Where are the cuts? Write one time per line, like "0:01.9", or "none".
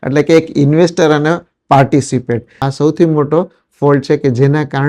0:02.6